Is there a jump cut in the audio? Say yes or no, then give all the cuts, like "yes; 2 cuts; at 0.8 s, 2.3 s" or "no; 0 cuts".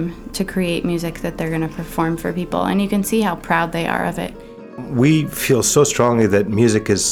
yes; 1 cut; at 4.8 s